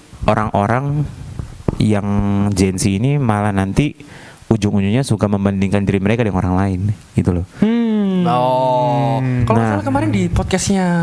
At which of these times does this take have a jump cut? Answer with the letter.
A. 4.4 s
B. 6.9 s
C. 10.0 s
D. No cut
D